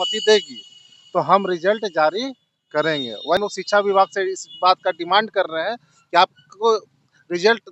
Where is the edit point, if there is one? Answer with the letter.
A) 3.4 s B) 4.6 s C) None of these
A